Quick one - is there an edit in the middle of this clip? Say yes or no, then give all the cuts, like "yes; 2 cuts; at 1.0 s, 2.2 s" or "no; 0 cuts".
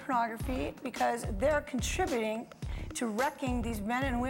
no; 0 cuts